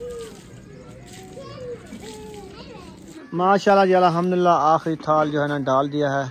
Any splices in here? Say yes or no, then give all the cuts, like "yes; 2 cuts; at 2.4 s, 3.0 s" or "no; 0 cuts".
yes; 1 cut; at 3.1 s